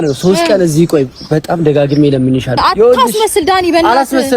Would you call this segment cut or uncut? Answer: cut